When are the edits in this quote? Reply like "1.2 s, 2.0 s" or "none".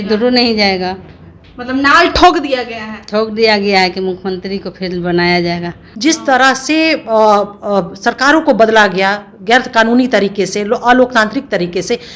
5.8 s